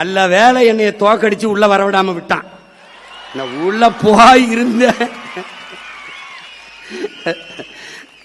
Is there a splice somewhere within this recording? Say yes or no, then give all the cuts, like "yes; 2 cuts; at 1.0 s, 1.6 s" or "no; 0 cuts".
no; 0 cuts